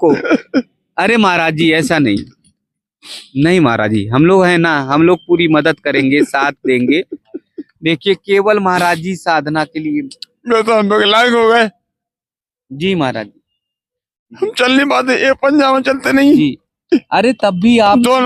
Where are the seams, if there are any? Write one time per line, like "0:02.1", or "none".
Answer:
none